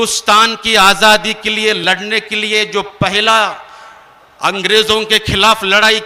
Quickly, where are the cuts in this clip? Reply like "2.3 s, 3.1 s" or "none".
none